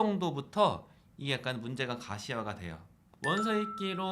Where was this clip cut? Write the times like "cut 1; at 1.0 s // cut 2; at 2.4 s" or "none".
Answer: cut 1; at 3.0 s

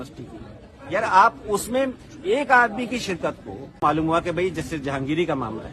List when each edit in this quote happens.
cut 1; at 3.8 s

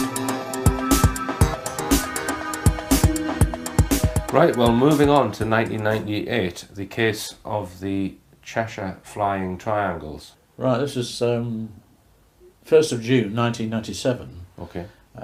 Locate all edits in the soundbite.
none

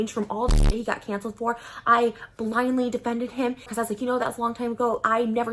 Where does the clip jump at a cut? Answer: cut 1; at 3.7 s

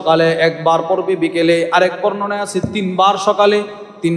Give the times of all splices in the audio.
none

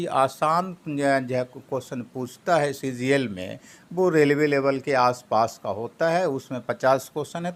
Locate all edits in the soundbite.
none

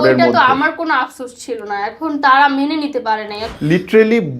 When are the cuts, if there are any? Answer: cut 1; at 3.5 s

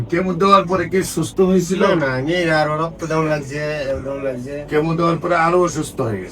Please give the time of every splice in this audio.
none

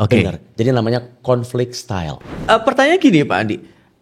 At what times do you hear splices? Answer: cut 1; at 2.3 s

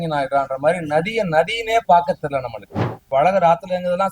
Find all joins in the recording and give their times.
cut 1; at 3.0 s

